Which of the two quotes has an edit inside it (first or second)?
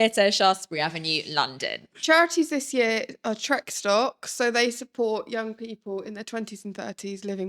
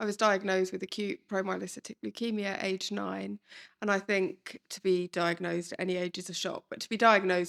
first